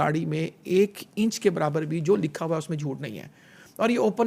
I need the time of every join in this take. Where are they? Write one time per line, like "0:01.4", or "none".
none